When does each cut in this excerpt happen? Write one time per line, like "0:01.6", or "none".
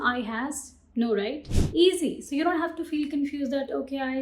0:01.5